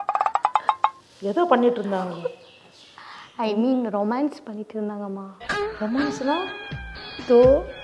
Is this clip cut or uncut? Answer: cut